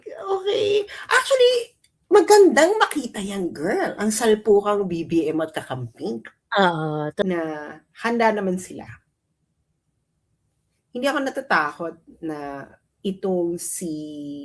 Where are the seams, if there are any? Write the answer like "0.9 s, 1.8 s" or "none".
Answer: 7.2 s